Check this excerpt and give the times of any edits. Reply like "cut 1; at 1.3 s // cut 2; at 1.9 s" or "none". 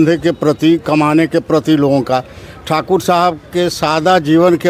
none